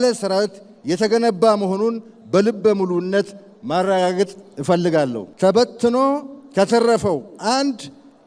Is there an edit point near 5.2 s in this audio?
yes; 1 cut; at 5.2 s

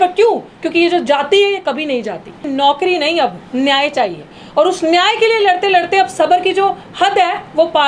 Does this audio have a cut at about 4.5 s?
no; 1 cut; at 2.4 s

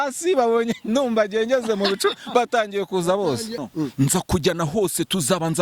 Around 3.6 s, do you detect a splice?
yes; 1 cut; at 3.6 s

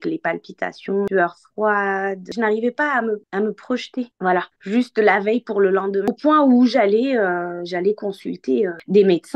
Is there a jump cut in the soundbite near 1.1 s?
yes; 3 cuts; at 1.1 s, 2.3 s, 6.1 s

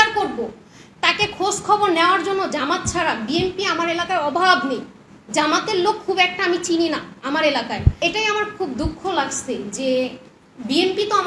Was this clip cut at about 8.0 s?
yes; 1 cut; at 8.0 s

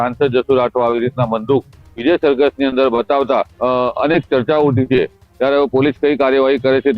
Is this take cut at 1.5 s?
no; 1 cut; at 3.5 s

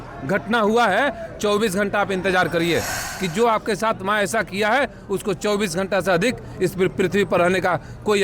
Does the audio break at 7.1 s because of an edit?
no; 1 cut; at 3.0 s

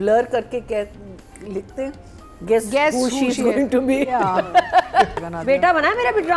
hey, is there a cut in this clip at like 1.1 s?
no; 1 cut; at 5.1 s

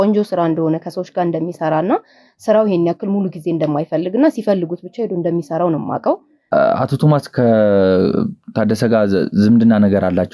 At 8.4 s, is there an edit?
no; 1 cut; at 6.3 s

